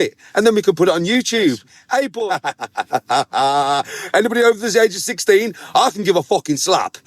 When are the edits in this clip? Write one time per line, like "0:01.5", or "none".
0:01.7